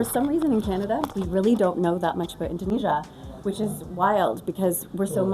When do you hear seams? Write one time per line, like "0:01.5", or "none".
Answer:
0:01.1
0:02.6